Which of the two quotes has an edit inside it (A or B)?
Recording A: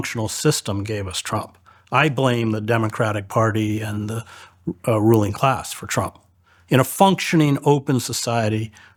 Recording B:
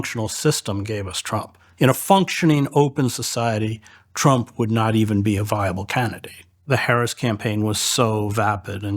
B